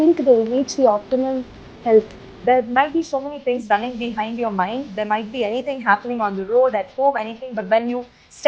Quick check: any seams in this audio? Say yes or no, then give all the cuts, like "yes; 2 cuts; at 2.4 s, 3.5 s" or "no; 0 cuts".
yes; 1 cut; at 2.3 s